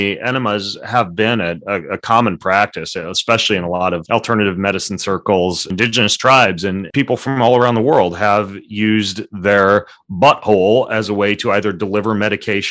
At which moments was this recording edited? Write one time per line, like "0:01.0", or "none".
0:04.0
0:05.6
0:06.9